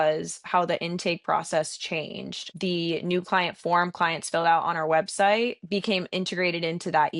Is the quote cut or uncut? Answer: cut